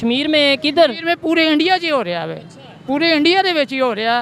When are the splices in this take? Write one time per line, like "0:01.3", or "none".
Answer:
0:02.7